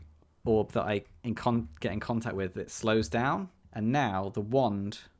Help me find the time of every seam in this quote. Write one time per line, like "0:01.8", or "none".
0:03.6